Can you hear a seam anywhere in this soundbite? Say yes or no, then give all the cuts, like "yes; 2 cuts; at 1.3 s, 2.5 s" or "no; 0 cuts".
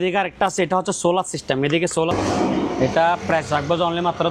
yes; 1 cut; at 2.1 s